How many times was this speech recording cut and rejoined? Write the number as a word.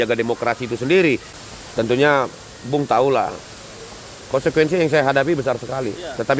one